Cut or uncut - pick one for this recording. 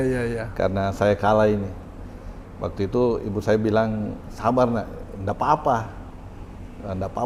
uncut